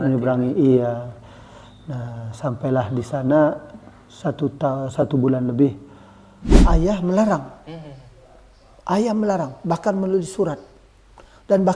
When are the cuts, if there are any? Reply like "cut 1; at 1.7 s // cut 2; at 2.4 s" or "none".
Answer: cut 1; at 6.6 s